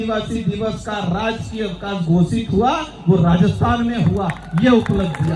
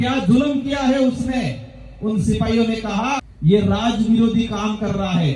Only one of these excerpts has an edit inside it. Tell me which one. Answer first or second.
second